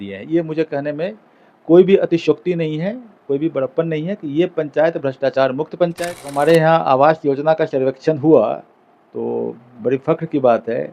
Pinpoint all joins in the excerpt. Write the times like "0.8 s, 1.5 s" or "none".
6.3 s